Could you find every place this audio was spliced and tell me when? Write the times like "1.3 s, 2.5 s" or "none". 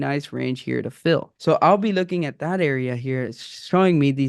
1.3 s